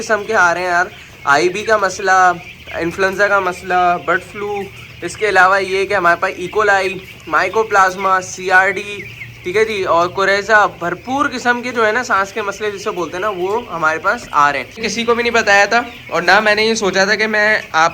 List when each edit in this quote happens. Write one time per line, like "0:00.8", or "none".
0:14.8